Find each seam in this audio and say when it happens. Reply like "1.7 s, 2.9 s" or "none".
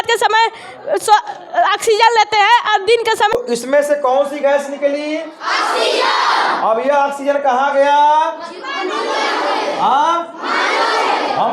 3.3 s